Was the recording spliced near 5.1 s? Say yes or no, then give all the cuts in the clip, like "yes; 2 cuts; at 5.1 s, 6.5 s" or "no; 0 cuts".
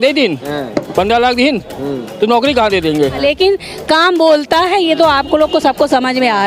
no; 1 cut; at 3.2 s